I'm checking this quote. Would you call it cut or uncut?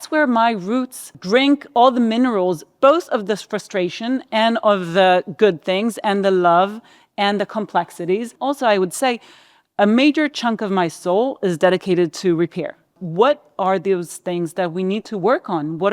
cut